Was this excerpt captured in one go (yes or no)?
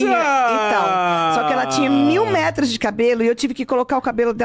yes